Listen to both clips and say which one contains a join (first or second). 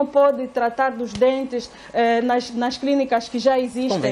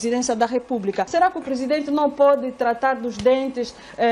second